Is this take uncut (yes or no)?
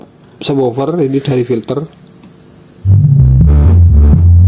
yes